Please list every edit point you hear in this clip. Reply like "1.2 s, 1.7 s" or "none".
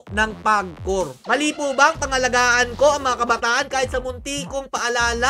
1.2 s